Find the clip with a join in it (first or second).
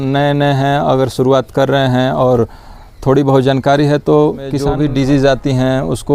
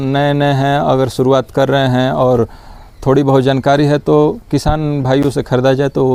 first